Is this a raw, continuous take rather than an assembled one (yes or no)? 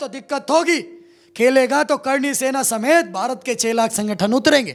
yes